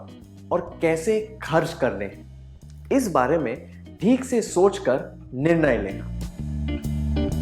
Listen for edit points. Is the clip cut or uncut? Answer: cut